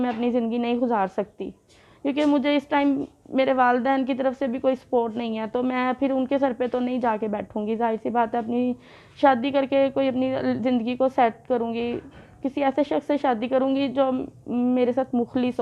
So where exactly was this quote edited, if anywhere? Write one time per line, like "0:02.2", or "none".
none